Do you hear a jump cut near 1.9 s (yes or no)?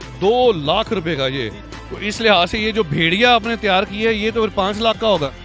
no